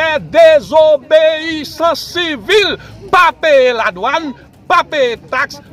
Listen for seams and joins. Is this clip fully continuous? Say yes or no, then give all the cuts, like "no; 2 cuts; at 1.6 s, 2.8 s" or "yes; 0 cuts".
yes; 0 cuts